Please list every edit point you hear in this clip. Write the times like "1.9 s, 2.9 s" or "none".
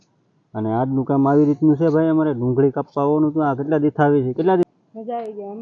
4.6 s

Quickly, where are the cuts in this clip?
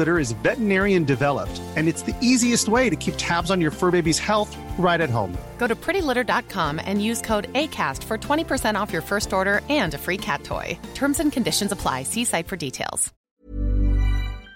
13.2 s

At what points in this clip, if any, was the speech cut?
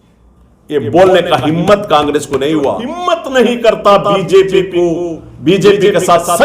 2.9 s

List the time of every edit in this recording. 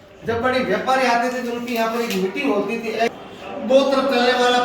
3.1 s

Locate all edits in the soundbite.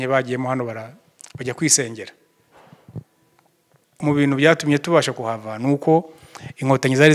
4.0 s

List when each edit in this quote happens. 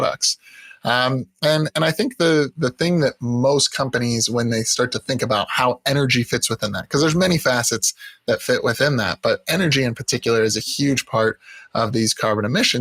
none

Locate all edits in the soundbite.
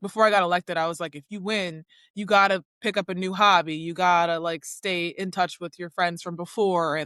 none

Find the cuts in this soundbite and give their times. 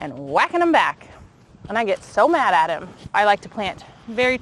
3.1 s

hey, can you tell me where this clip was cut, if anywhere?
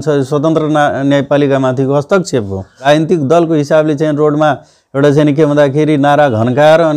2.7 s

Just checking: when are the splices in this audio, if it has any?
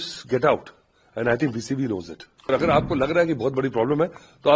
2.4 s

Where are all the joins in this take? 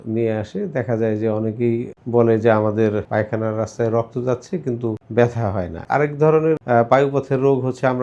2.0 s, 3.1 s, 5.0 s, 5.8 s, 6.6 s

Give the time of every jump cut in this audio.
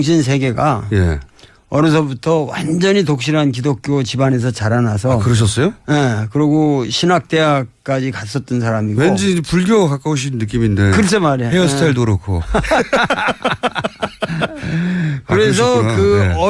5.8 s

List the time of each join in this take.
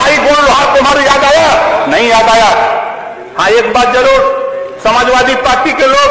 3.0 s

